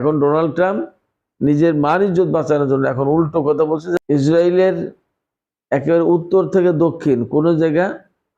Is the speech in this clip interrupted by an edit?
yes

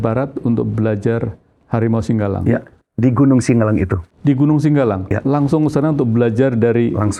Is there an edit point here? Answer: no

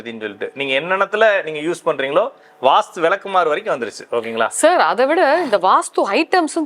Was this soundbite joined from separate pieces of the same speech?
no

